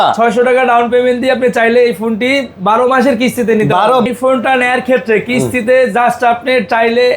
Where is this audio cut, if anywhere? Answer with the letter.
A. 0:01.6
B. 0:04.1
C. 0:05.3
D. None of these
B